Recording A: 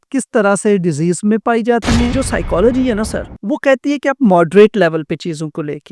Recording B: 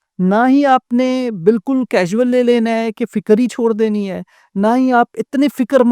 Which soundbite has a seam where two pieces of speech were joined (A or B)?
A